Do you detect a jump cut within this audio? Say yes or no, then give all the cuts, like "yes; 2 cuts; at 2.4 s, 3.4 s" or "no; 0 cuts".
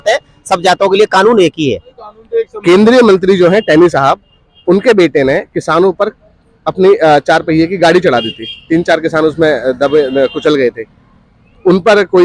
no; 0 cuts